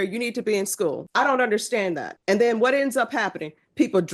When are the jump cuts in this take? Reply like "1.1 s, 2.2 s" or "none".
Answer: 1.0 s, 2.1 s